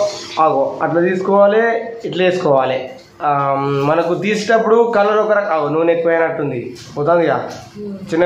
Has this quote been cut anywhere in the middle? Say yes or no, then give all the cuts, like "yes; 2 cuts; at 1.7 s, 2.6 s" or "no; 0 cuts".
no; 0 cuts